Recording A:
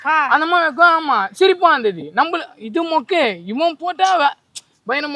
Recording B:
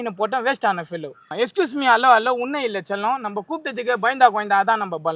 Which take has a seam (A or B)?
B